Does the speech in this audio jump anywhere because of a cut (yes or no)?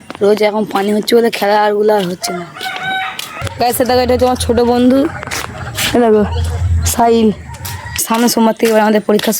yes